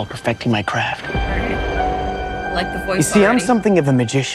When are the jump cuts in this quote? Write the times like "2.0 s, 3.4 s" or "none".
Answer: 2.9 s